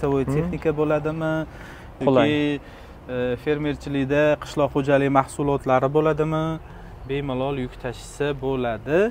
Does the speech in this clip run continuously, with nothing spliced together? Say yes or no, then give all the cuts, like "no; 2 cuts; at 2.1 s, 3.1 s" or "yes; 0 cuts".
yes; 0 cuts